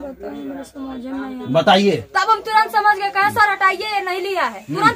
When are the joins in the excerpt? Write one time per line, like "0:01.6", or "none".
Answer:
none